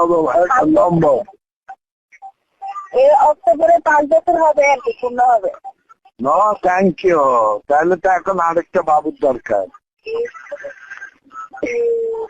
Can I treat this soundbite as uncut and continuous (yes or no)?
yes